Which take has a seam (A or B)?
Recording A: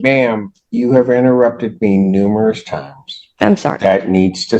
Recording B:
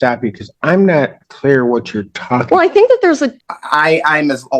B